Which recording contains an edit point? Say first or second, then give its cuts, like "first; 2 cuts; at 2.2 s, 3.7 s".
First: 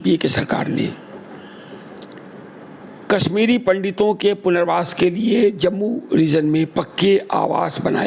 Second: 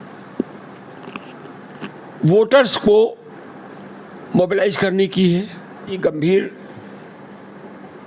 second; 1 cut; at 6.0 s